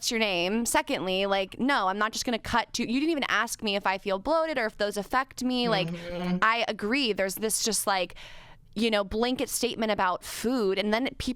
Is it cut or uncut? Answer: uncut